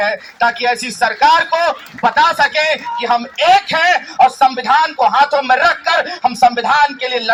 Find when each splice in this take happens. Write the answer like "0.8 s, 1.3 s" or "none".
none

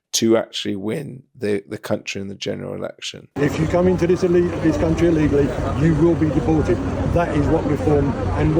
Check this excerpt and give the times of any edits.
3.3 s

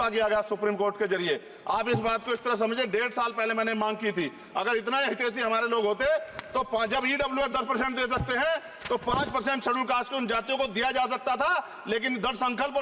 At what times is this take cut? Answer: none

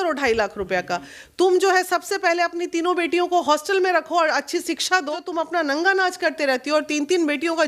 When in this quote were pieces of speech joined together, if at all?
5.2 s

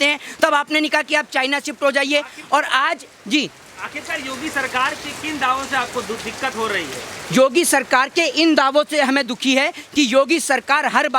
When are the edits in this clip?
none

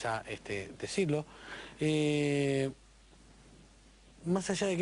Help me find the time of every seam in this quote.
2.0 s

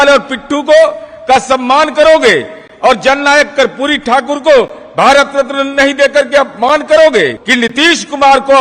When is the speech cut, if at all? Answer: 7.4 s

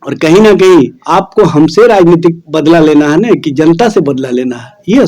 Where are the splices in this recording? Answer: 1.0 s, 2.5 s

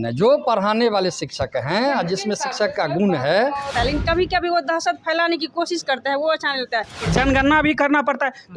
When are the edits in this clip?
3.7 s, 7.0 s

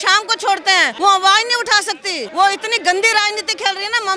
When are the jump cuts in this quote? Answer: 0.9 s, 2.2 s

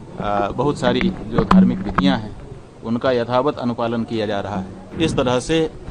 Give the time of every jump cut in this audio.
4.8 s

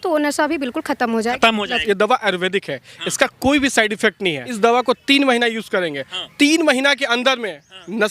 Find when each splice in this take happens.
1.8 s, 4.5 s

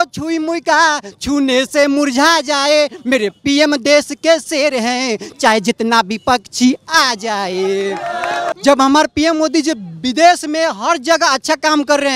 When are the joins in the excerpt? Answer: 8.5 s

